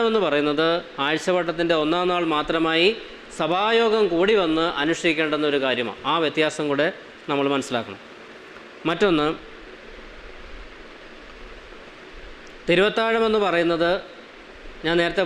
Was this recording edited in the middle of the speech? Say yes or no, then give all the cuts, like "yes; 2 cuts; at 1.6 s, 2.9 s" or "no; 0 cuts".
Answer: no; 0 cuts